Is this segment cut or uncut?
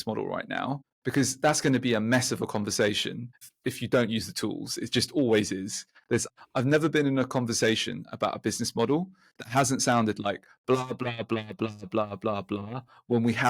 cut